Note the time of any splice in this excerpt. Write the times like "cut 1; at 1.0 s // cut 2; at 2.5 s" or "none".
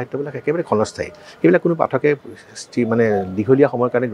none